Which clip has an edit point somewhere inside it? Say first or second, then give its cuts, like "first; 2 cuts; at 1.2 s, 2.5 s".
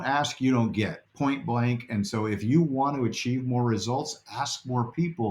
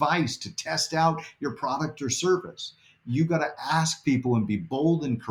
first; 1 cut; at 1.0 s